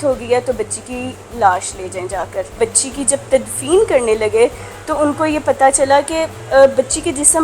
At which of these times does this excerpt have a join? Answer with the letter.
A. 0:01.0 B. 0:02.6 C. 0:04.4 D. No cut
B